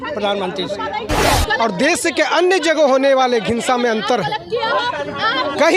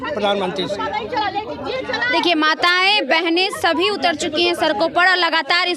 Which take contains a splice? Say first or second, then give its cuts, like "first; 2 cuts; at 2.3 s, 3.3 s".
first; 1 cut; at 1.2 s